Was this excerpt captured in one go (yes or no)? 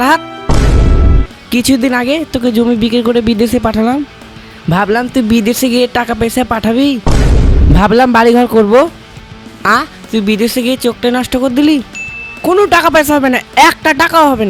yes